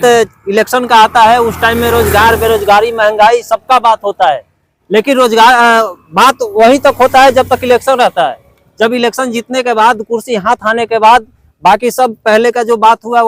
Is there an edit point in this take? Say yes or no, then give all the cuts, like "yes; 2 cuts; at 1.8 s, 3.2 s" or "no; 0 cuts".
no; 0 cuts